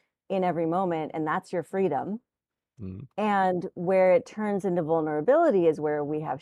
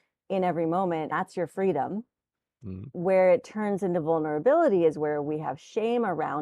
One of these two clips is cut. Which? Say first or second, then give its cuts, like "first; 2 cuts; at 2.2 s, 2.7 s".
second; 2 cuts; at 1.1 s, 2.9 s